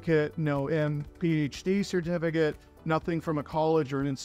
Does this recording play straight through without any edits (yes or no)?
yes